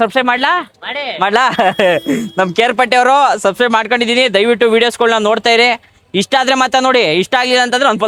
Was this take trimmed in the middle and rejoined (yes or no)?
no